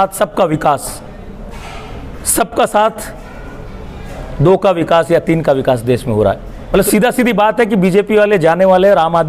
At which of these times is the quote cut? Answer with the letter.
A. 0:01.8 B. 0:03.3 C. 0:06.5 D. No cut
C